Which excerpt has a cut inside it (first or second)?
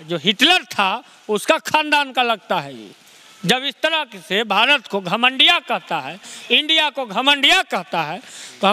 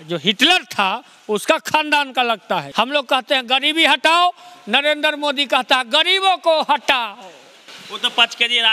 second